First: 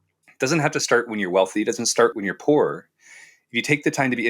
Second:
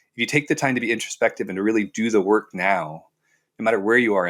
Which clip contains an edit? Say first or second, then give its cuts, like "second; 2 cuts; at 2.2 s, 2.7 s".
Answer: first; 1 cut; at 2.1 s